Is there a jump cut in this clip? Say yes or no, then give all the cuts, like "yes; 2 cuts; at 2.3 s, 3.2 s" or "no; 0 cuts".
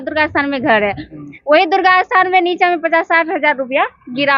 no; 0 cuts